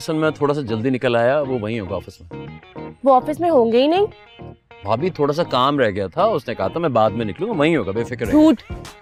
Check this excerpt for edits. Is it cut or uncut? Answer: uncut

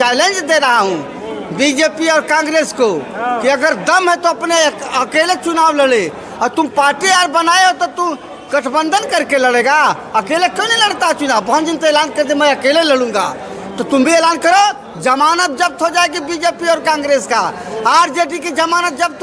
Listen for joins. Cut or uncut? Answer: uncut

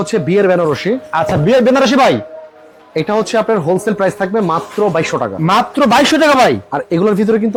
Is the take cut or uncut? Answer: uncut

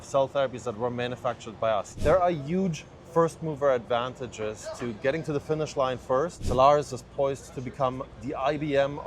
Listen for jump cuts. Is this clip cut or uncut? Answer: cut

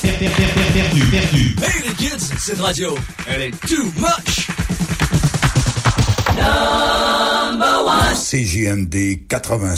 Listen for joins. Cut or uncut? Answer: uncut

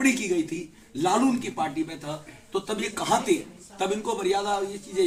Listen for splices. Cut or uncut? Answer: uncut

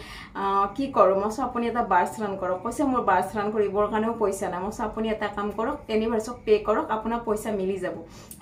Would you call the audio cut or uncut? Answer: uncut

